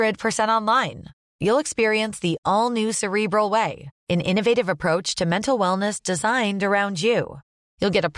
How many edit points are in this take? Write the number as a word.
zero